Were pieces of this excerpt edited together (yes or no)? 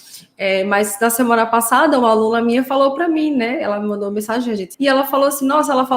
yes